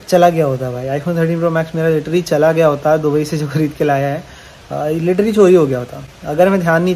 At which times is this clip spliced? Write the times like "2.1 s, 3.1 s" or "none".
none

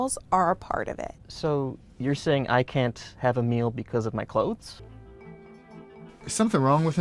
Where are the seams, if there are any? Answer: 4.8 s

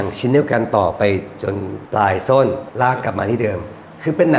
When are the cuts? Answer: 1.8 s, 2.7 s

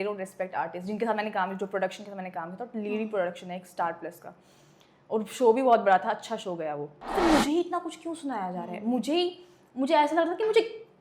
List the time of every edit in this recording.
6.9 s

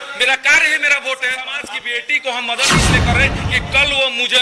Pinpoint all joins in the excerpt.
1.6 s

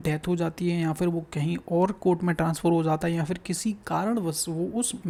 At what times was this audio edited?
none

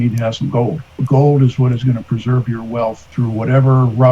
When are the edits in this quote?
1.0 s, 3.1 s

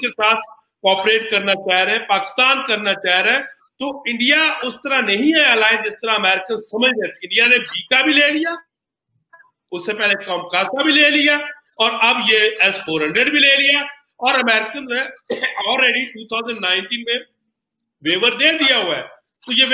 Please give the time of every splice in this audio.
none

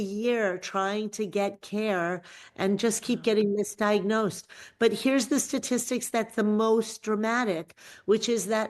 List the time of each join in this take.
none

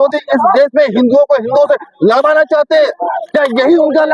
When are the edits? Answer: none

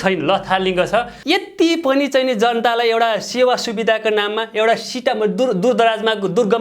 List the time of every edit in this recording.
1.1 s

